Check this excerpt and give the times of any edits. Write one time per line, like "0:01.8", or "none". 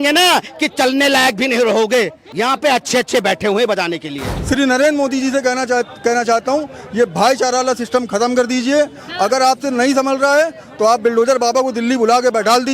0:02.2
0:04.3

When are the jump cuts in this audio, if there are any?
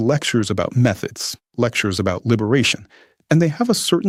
none

